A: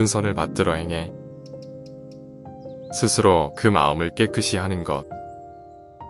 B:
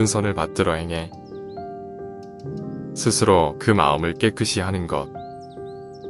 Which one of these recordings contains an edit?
B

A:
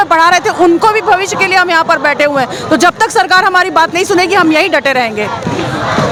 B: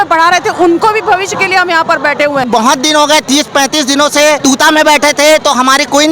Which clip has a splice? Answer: B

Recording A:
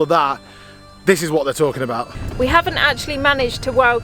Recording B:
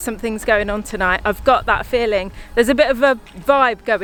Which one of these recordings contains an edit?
A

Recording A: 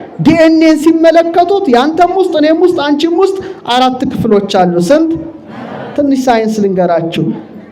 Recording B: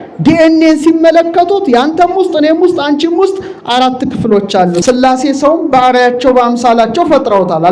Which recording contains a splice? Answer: B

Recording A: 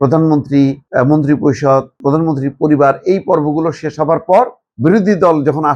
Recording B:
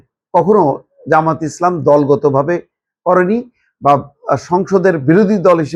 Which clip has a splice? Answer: A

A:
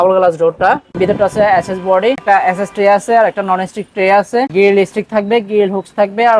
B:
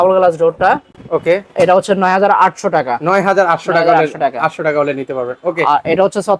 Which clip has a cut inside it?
A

